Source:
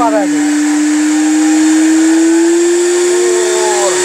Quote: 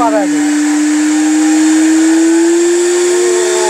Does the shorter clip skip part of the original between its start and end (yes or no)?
no